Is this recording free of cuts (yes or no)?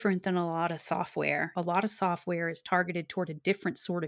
no